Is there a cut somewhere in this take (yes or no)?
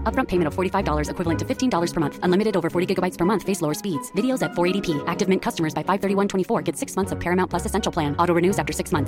no